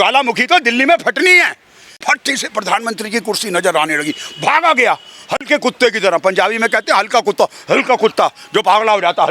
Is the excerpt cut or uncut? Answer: cut